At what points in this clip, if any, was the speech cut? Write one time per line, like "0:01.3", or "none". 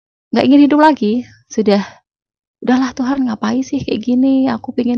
none